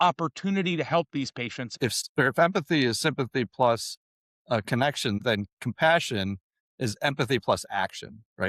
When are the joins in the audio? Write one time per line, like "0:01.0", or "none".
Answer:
0:01.9
0:05.2